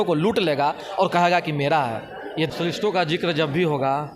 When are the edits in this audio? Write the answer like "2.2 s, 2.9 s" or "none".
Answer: 2.5 s